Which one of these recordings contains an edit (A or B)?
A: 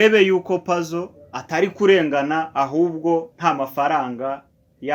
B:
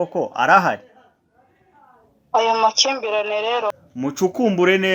B